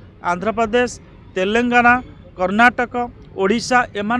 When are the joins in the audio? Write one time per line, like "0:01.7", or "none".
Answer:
none